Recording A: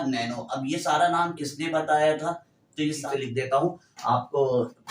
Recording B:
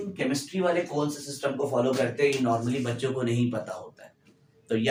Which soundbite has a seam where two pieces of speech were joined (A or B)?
A